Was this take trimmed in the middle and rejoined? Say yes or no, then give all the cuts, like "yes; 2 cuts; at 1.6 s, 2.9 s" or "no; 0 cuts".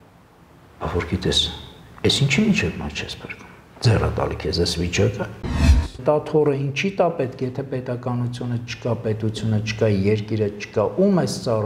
yes; 1 cut; at 5.6 s